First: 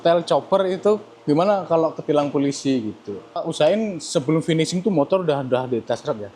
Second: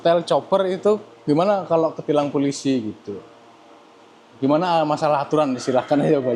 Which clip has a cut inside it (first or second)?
first